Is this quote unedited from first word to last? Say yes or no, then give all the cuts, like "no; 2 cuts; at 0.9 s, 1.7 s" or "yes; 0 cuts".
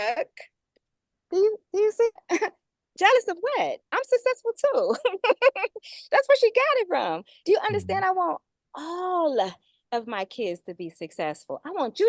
yes; 0 cuts